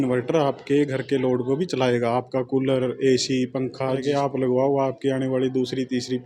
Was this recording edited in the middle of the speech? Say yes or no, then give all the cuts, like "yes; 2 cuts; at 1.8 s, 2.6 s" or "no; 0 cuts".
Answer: yes; 1 cut; at 4.0 s